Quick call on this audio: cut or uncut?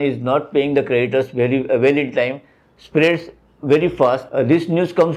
uncut